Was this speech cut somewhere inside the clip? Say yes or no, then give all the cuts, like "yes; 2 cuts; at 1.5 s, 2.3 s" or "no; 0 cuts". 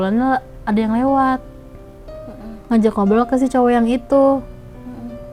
no; 0 cuts